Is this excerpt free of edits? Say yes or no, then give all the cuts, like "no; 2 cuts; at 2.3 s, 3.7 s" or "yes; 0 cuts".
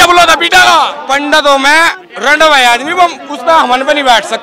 no; 1 cut; at 1.0 s